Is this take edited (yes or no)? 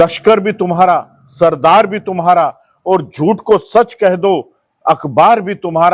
no